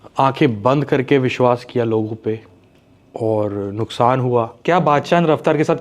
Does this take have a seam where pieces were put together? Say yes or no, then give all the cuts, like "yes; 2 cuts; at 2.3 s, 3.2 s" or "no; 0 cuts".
yes; 1 cut; at 4.5 s